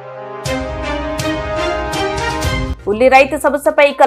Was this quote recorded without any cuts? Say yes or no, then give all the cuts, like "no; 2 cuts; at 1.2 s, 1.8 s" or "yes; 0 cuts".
no; 1 cut; at 2.7 s